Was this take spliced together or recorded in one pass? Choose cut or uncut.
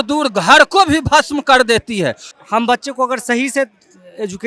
cut